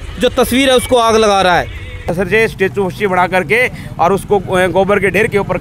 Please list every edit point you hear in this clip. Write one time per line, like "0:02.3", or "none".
0:02.1